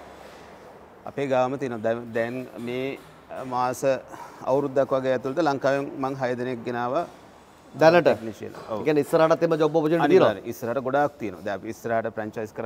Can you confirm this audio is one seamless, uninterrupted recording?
yes; 0 cuts

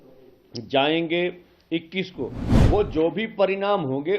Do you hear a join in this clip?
yes; 1 cut; at 2.4 s

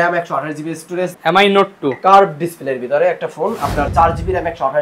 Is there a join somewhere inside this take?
yes; 2 cuts; at 1.1 s, 3.9 s

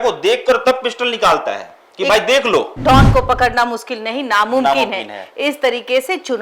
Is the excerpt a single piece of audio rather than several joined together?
no; 1 cut; at 2.7 s

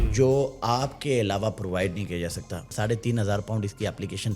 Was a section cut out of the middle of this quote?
yes; 1 cut; at 2.7 s

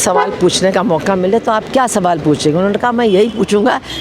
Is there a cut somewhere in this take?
no; 0 cuts

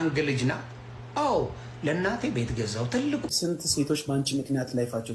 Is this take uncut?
no; 1 cut; at 3.3 s

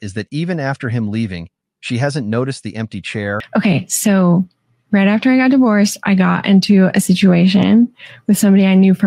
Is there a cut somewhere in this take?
yes; 1 cut; at 3.4 s

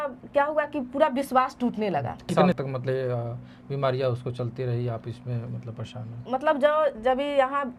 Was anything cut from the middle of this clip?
no; 0 cuts

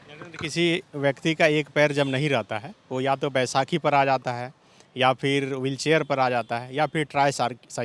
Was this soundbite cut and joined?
no; 0 cuts

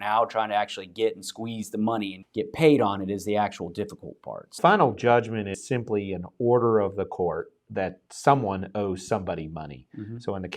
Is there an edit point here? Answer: yes; 1 cut; at 4.5 s

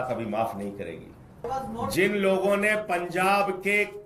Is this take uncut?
no; 1 cut; at 1.4 s

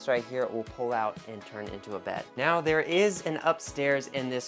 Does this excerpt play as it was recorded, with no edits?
no; 1 cut; at 2.3 s

